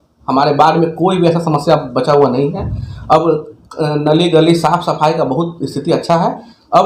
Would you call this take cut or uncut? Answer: uncut